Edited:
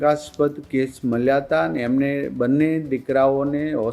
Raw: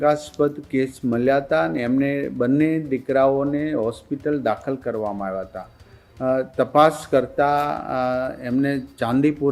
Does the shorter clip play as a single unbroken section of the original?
yes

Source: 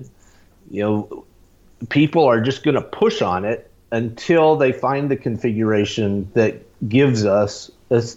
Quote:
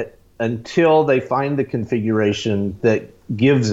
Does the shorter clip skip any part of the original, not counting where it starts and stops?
no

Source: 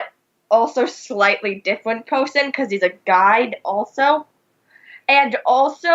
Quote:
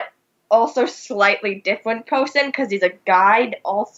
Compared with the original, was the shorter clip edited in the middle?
no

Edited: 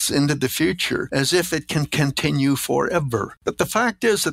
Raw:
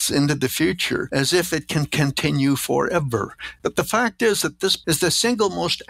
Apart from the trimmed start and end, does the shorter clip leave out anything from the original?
yes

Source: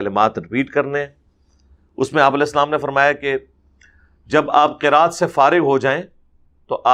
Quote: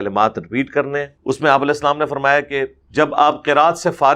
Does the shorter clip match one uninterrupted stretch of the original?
no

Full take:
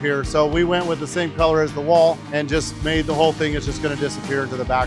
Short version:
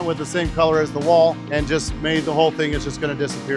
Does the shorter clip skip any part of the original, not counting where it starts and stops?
no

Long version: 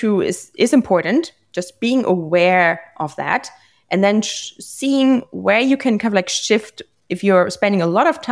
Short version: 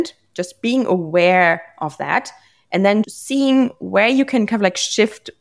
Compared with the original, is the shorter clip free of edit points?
no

